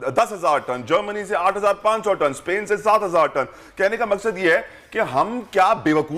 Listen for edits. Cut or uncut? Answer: uncut